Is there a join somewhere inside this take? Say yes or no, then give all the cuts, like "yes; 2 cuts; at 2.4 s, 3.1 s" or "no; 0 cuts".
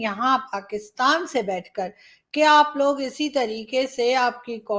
no; 0 cuts